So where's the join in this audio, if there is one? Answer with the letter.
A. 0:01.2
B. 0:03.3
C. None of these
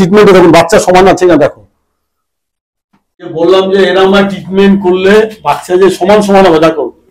B